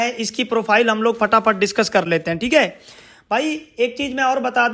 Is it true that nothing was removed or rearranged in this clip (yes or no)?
yes